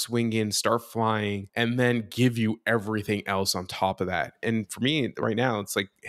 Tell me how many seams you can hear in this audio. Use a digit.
2